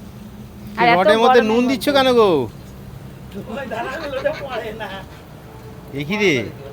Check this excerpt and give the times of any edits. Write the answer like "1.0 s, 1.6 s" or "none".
none